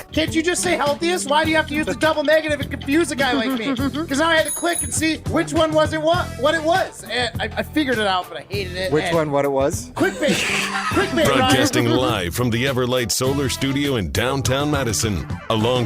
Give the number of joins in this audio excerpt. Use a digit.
1